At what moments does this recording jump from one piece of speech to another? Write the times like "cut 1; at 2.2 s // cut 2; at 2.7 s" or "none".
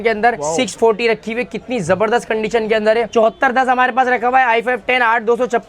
cut 1; at 3.1 s

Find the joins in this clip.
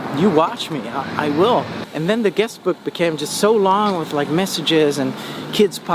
cut 1; at 1.8 s

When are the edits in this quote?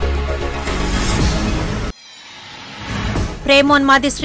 cut 1; at 1.2 s // cut 2; at 3.2 s

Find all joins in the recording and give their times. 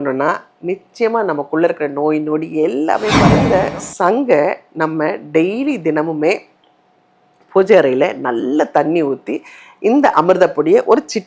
cut 1; at 3.5 s

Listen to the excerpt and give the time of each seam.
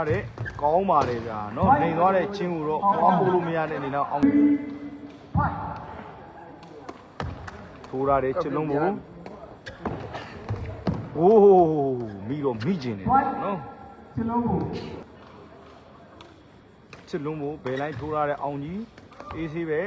none

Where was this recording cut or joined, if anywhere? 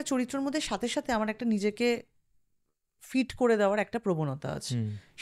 none

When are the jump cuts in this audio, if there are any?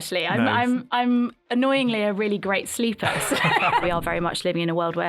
cut 1; at 3.8 s

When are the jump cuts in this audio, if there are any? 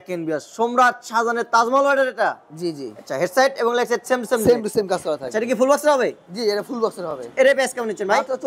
none

